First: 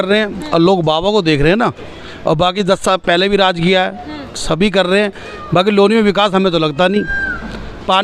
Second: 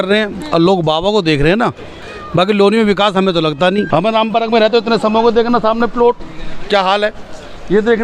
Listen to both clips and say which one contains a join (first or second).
second